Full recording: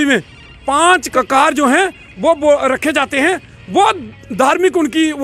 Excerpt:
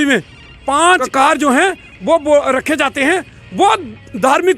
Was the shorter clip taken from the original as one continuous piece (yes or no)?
no